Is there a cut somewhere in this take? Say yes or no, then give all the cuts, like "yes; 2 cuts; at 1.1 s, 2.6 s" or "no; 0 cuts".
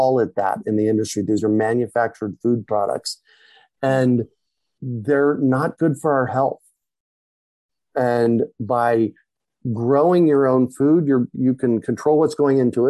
no; 0 cuts